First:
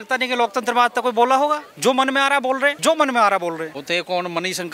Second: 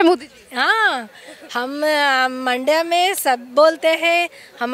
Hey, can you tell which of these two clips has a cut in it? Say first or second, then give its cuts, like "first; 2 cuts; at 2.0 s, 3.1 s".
first; 3 cuts; at 1.7 s, 2.8 s, 3.8 s